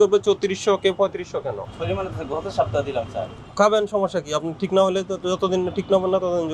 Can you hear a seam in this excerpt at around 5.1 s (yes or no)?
no